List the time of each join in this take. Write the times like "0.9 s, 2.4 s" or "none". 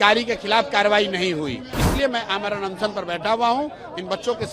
1.7 s